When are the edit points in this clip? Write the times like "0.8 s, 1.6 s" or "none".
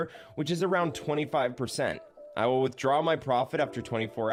none